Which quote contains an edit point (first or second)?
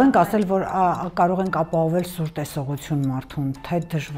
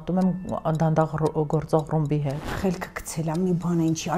second